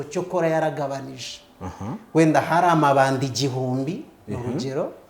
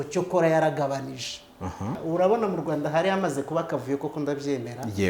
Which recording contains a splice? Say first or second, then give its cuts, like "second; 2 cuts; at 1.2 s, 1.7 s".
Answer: second; 1 cut; at 2.0 s